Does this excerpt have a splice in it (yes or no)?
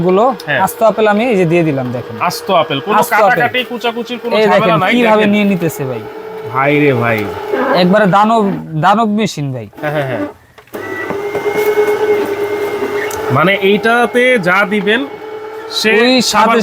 no